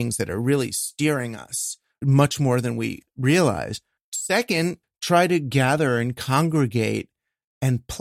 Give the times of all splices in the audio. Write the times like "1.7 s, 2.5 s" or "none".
2.0 s, 3.0 s, 4.0 s, 4.9 s